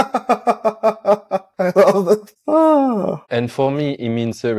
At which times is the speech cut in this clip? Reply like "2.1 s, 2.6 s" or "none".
1.5 s, 3.2 s